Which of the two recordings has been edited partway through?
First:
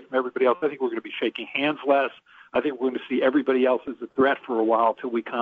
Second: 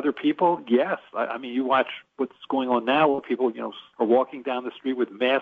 second; 1 cut; at 3.8 s

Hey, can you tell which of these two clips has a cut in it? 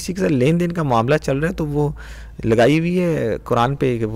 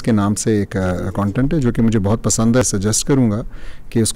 second; 1 cut; at 2.6 s

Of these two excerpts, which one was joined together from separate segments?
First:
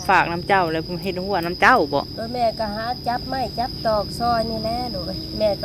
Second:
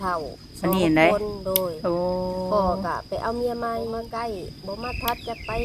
second; 1 cut; at 4.0 s

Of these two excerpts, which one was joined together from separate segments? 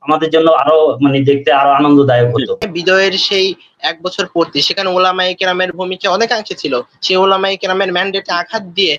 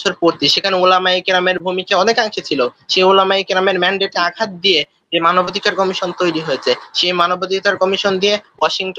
first; 1 cut; at 2.6 s

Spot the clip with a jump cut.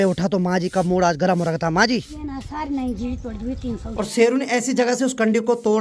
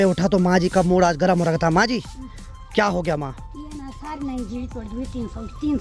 first; 2 cuts; at 2.2 s, 3.9 s

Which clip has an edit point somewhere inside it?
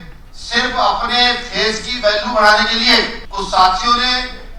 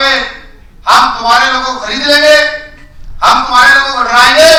first; 1 cut; at 3.2 s

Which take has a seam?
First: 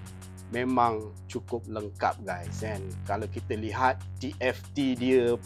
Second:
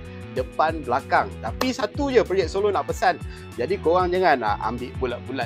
second; 1 cut; at 1.4 s

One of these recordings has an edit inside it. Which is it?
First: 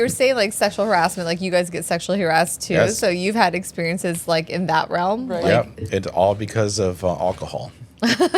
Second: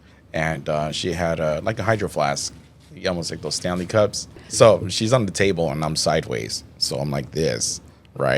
second; 1 cut; at 4.4 s

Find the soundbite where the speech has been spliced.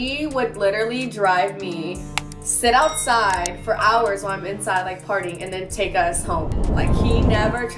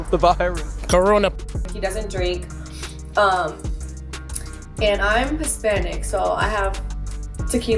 second; 1 cut; at 1.5 s

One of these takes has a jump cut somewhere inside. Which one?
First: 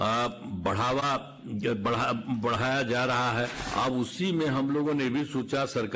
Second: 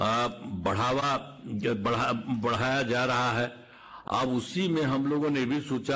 first; 1 cut; at 3.6 s

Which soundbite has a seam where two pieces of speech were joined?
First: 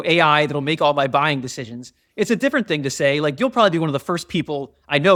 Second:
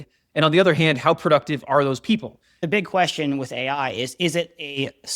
second; 1 cut; at 2.6 s

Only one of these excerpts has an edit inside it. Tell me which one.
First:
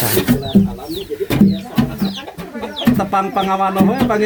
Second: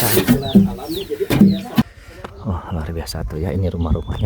second; 1 cut; at 1.8 s

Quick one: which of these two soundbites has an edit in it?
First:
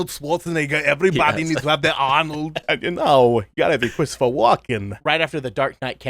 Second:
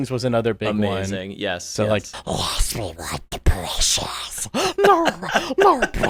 first; 2 cuts; at 2.6 s, 4.9 s

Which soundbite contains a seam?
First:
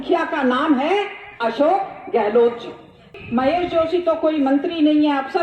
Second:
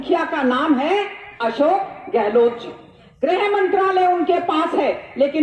first; 1 cut; at 3.2 s

